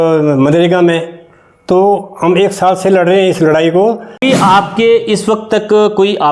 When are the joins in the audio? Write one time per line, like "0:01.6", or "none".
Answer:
0:04.2